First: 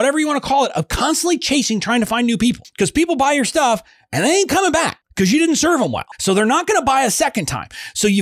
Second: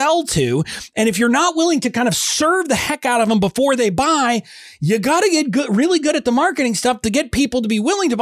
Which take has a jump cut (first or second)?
first